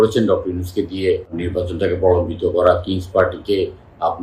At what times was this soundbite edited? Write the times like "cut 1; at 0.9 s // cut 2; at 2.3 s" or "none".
cut 1; at 1.4 s